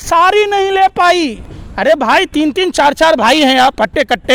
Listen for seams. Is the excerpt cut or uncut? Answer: uncut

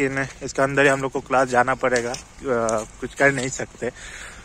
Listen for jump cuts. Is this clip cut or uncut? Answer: uncut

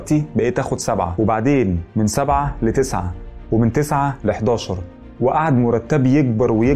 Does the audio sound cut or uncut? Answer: cut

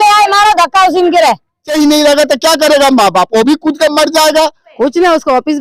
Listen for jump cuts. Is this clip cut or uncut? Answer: cut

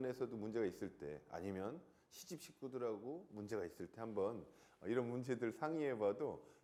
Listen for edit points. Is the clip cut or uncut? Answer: uncut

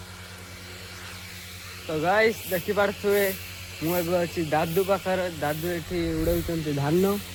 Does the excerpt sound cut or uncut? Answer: uncut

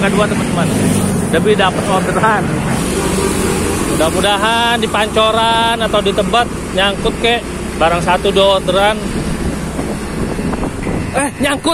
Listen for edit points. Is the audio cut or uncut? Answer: cut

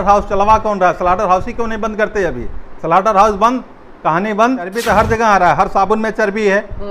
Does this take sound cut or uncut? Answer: cut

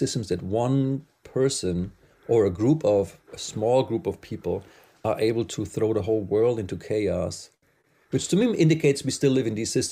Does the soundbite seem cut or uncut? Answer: uncut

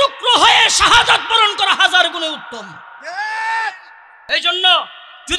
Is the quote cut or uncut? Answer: cut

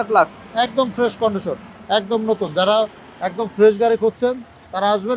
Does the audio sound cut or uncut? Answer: uncut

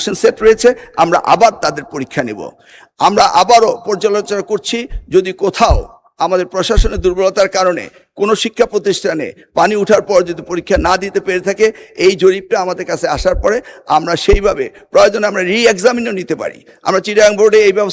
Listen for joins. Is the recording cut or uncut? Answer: uncut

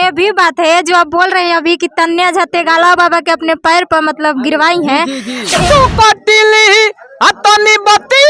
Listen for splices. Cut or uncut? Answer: cut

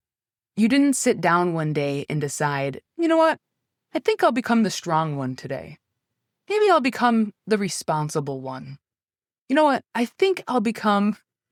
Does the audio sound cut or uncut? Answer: uncut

